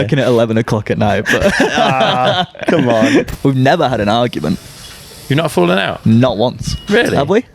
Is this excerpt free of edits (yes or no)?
no